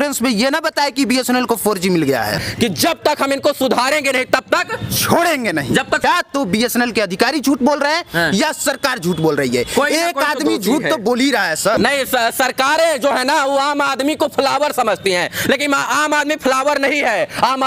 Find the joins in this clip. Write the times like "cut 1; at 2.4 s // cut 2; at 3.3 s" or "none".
cut 1; at 2.3 s // cut 2; at 6.0 s // cut 3; at 11.8 s